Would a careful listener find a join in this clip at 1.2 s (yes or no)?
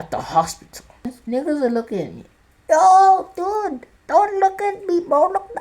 yes